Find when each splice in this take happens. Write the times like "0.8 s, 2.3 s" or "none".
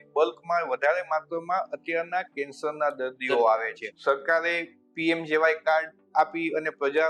3.8 s